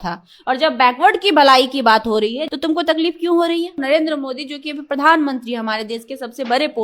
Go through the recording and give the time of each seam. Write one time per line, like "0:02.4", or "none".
0:02.4
0:03.8